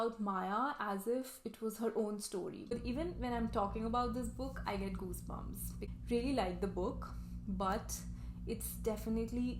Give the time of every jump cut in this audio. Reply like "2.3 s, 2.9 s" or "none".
2.7 s, 5.8 s